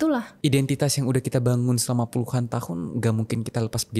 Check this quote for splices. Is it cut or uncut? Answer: uncut